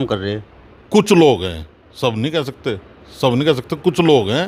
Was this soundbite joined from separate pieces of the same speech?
no; 0 cuts

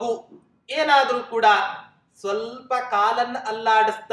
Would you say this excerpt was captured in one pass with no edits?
yes; 0 cuts

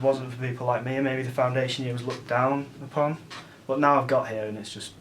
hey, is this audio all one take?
yes; 0 cuts

